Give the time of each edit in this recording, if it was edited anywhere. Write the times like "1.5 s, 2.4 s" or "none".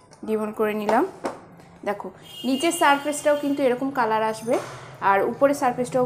none